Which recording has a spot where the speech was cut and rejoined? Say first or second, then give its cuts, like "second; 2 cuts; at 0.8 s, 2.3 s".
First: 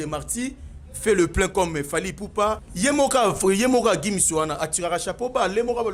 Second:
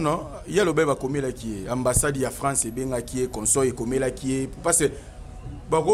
first; 1 cut; at 2.7 s